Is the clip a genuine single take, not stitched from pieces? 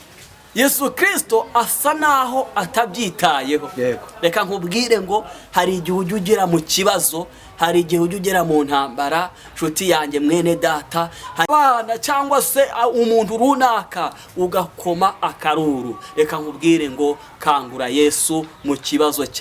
no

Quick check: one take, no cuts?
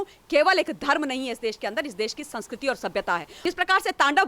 no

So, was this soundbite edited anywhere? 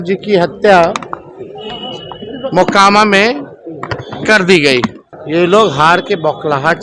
yes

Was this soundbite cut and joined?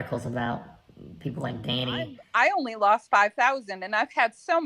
yes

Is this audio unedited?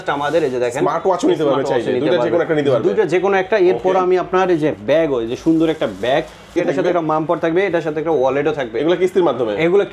no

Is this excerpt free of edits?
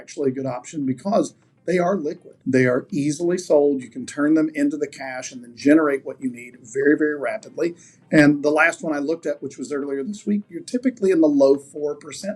no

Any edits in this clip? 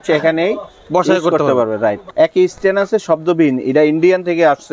yes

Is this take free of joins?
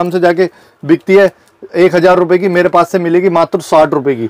yes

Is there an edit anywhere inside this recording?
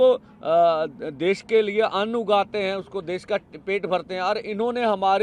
no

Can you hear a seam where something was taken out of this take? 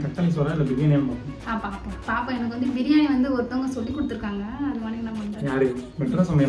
no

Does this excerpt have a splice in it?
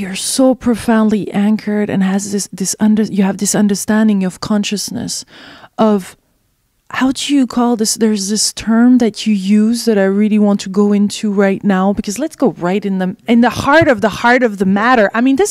yes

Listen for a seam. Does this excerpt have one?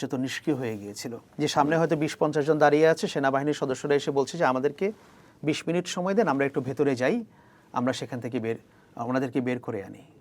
yes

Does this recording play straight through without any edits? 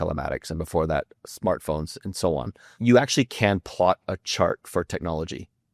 no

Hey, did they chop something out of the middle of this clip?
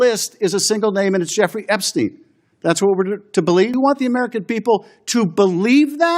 yes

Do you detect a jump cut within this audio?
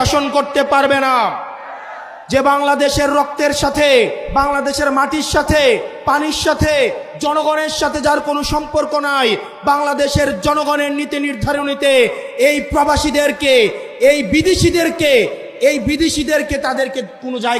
no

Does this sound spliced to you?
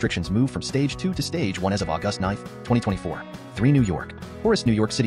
yes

